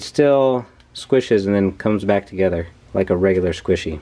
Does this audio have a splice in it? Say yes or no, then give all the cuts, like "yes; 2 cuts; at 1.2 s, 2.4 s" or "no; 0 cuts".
yes; 1 cut; at 2.8 s